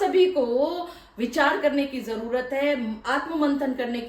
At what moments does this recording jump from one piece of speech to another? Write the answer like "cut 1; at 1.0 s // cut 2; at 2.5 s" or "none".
none